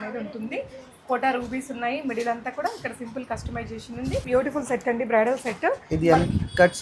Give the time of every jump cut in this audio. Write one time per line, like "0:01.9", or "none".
0:04.3